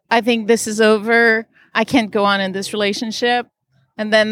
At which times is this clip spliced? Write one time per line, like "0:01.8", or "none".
0:01.7